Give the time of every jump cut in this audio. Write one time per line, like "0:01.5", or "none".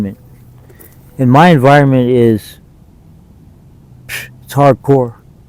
none